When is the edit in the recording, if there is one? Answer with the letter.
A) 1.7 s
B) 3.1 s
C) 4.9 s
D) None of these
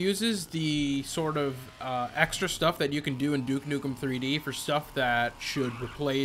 D